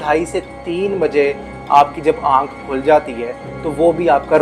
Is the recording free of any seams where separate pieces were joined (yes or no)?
yes